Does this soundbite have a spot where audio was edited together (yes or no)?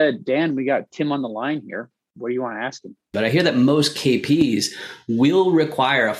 yes